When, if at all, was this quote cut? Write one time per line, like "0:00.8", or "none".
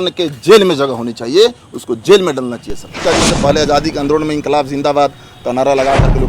0:03.0